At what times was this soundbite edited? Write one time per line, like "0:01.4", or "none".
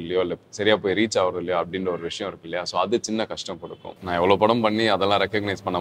0:04.0

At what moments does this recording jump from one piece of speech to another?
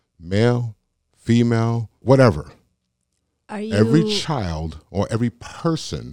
0:02.0

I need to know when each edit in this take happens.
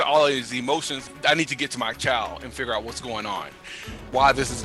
0:01.0

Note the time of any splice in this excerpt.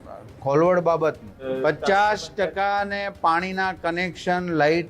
0:01.4

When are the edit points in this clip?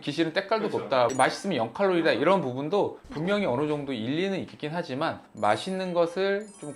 0:01.1

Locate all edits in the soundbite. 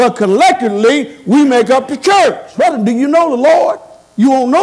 0:02.4

